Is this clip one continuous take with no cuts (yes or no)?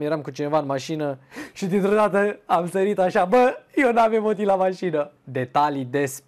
no